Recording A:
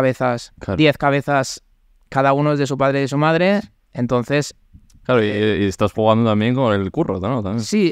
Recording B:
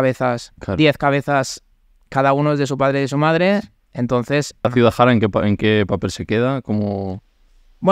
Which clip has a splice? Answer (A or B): B